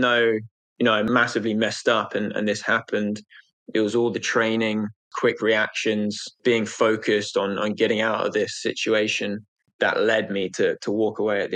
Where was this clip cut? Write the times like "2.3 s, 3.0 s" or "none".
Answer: 1.1 s, 5.1 s, 6.3 s, 9.6 s